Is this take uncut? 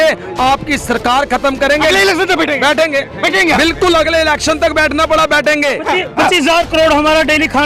no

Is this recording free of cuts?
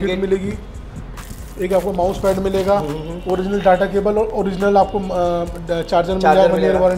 yes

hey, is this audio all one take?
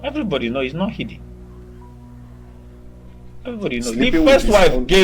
yes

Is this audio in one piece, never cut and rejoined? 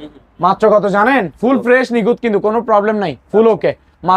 yes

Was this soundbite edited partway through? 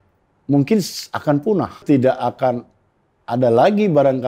yes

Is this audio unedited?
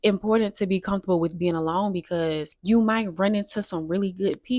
no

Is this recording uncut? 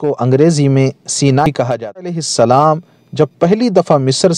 no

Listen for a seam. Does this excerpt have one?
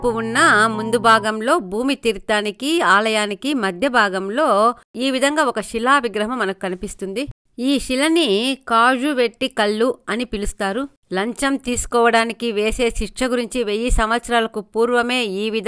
no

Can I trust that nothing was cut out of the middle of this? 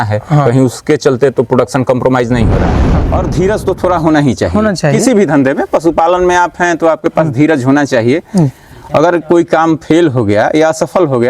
no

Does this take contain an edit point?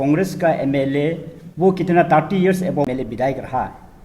yes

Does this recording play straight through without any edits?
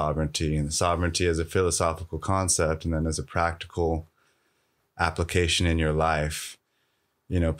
yes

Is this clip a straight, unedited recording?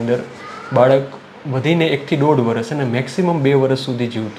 yes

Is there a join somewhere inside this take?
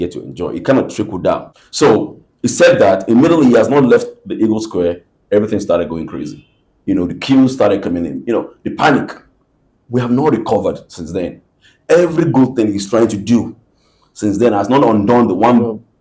yes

